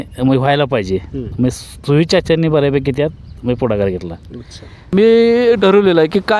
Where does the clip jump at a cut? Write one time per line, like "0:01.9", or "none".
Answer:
0:04.9